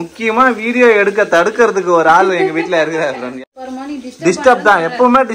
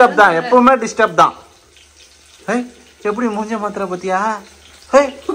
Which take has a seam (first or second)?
first